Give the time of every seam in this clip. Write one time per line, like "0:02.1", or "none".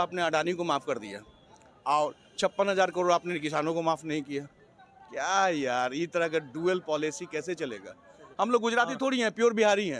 none